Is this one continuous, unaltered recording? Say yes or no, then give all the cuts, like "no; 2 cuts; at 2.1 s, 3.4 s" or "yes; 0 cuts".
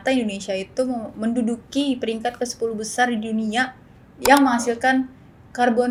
yes; 0 cuts